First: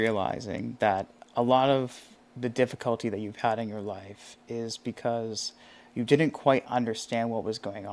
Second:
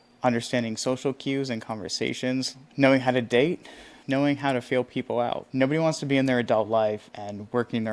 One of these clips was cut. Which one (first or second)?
second